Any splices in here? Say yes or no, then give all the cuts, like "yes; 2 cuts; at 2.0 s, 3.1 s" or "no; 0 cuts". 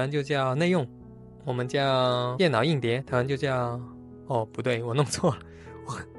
no; 0 cuts